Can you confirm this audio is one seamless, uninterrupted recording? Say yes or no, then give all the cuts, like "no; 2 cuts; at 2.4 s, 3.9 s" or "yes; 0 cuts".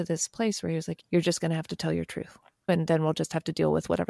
no; 2 cuts; at 0.9 s, 2.7 s